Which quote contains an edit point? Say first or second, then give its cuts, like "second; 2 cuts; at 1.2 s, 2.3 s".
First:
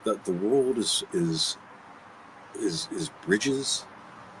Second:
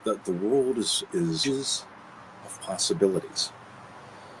second; 1 cut; at 1.4 s